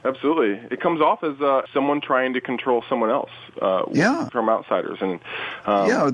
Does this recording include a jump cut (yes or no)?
yes